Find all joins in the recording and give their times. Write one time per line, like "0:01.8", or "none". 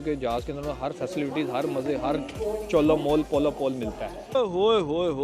0:04.4